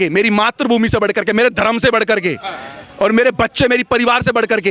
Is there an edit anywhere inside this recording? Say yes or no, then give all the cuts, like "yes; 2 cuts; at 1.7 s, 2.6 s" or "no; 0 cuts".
no; 0 cuts